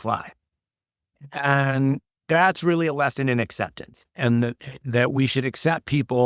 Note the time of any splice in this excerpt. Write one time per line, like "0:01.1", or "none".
0:01.2

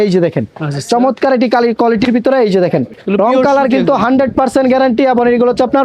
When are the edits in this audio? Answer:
0:03.0

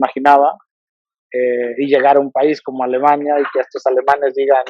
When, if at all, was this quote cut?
none

